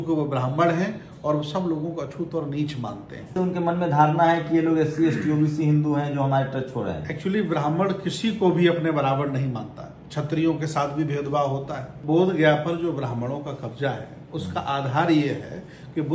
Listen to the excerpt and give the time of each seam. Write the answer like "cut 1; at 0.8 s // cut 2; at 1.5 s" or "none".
cut 1; at 3.3 s // cut 2; at 12.0 s